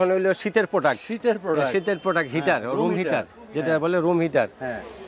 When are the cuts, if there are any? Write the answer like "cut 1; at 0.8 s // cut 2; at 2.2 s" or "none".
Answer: none